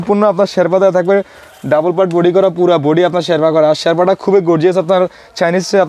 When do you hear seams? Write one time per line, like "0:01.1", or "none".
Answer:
none